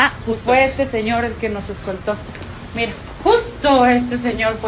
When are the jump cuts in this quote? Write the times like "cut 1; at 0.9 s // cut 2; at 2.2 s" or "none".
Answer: none